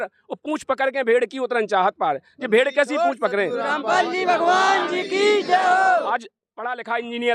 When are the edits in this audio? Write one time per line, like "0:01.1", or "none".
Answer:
0:06.1